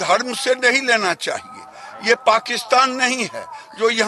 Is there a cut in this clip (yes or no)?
no